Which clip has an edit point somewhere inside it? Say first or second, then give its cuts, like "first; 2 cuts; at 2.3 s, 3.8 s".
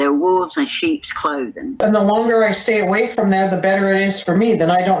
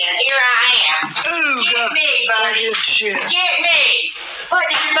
first; 1 cut; at 1.7 s